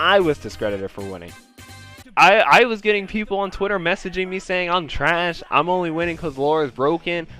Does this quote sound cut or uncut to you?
cut